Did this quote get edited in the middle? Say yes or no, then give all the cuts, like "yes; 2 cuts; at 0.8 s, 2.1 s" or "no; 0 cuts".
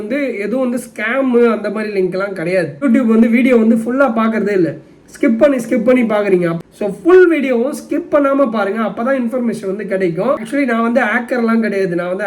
yes; 3 cuts; at 2.8 s, 6.6 s, 10.4 s